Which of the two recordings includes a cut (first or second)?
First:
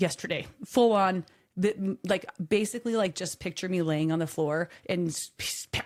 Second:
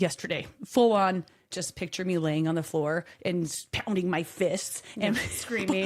second